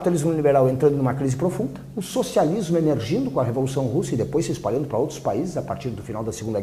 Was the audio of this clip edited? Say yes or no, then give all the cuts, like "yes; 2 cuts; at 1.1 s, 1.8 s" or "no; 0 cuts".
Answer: no; 0 cuts